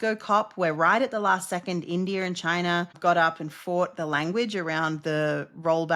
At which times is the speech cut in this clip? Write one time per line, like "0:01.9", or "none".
0:02.9